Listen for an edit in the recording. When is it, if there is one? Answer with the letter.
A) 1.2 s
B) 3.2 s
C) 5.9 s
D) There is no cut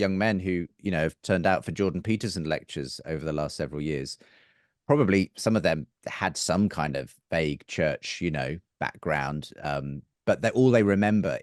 D